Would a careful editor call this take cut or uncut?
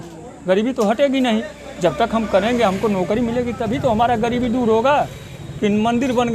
uncut